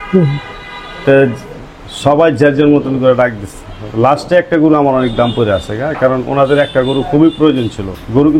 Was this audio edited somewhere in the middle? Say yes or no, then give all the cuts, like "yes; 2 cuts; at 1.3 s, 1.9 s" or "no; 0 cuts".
no; 0 cuts